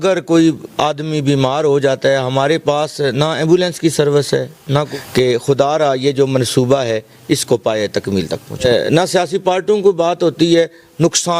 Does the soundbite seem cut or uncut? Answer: cut